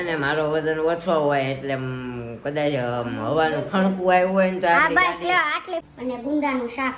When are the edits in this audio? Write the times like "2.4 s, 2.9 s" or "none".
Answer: 5.8 s